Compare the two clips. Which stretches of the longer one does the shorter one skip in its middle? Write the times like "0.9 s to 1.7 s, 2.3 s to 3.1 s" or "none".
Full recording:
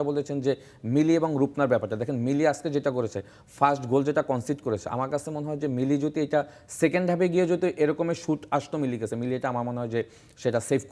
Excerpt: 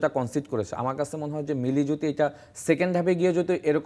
none